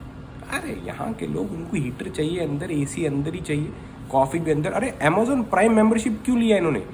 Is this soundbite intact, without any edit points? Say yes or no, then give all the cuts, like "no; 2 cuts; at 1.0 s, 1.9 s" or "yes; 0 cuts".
yes; 0 cuts